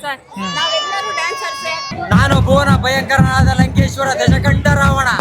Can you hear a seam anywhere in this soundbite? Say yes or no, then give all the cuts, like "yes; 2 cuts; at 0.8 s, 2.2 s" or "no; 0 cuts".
yes; 1 cut; at 1.9 s